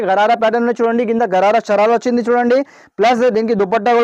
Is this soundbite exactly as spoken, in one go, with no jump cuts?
yes; 0 cuts

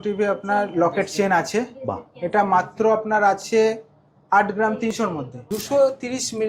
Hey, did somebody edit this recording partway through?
yes; 1 cut; at 5.4 s

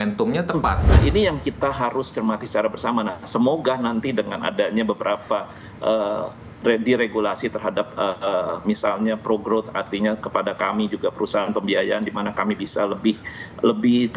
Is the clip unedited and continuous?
no; 1 cut; at 1.0 s

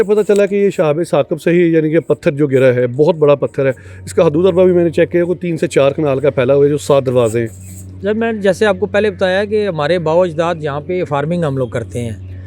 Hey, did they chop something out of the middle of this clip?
no; 0 cuts

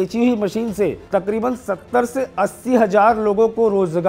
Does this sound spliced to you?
yes; 1 cut; at 1.0 s

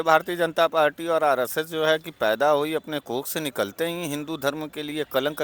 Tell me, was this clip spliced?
no; 0 cuts

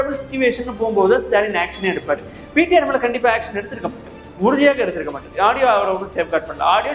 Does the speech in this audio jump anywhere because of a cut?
no; 0 cuts

